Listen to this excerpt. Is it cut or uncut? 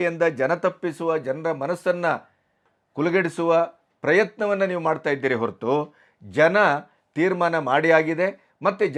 uncut